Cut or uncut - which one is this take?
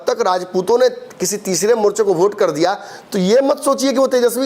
uncut